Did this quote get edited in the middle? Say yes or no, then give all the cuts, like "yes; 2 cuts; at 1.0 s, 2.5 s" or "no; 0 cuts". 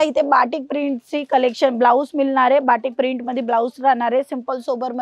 no; 0 cuts